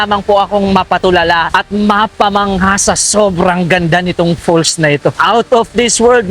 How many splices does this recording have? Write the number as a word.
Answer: two